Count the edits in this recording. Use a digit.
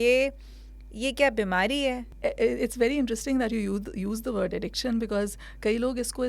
1